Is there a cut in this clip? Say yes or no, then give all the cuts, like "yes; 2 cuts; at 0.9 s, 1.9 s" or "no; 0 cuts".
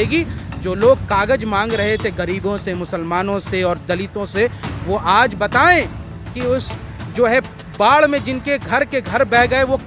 no; 0 cuts